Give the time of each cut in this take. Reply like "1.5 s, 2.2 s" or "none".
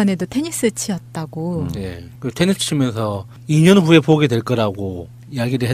none